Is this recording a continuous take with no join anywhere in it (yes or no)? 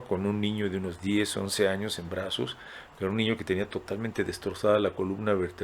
yes